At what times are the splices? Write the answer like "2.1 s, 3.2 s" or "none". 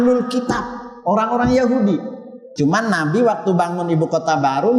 2.4 s